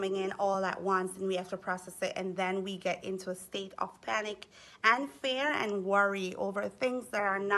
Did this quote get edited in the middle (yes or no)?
no